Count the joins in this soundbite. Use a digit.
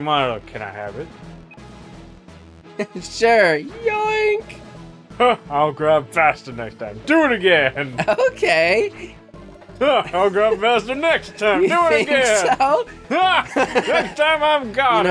0